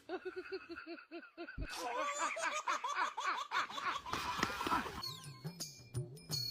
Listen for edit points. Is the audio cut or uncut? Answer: cut